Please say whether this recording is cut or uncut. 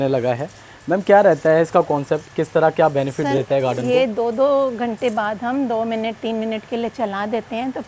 uncut